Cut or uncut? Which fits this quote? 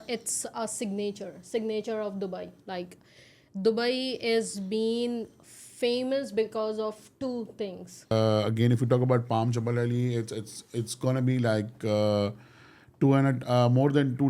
cut